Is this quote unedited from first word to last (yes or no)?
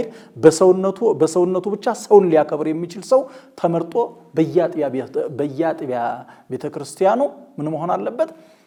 yes